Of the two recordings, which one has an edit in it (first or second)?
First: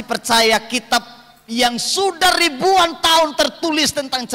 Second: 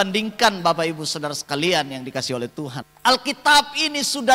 second